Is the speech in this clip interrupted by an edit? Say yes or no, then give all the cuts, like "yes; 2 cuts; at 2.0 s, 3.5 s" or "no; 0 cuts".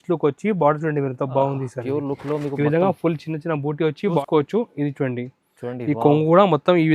yes; 1 cut; at 4.2 s